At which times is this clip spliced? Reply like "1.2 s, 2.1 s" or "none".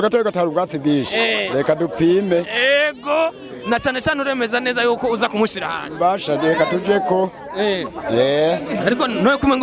none